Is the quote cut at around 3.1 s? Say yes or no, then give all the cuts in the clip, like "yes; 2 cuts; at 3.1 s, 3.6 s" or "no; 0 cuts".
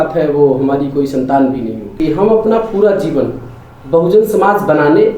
no; 1 cut; at 1.8 s